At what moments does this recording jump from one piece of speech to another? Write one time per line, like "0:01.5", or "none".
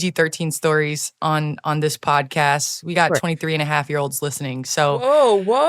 none

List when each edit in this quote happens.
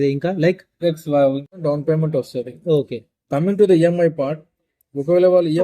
0:01.5

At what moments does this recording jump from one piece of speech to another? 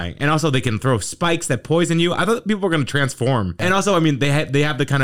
0:03.5

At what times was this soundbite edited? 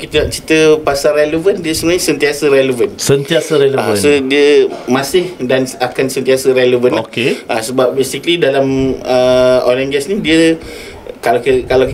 none

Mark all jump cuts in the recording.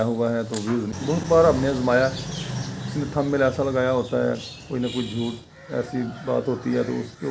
0:00.9

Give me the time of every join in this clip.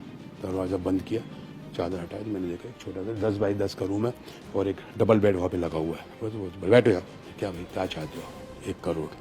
0:07.2

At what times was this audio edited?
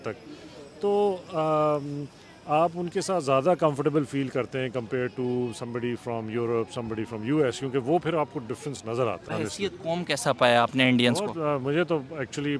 0:09.2

